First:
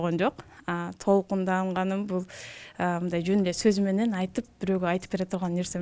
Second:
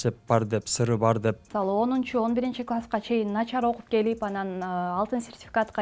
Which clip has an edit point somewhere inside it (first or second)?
second